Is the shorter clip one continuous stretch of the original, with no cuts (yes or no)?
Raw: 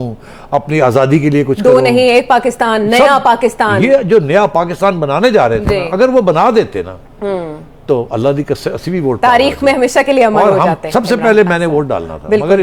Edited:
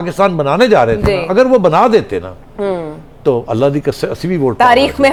yes